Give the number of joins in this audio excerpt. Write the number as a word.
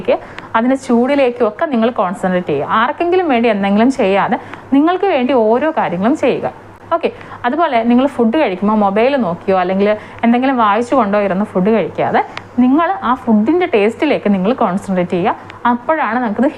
zero